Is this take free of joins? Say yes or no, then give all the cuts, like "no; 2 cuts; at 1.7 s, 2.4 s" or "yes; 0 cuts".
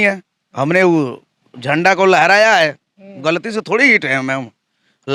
yes; 0 cuts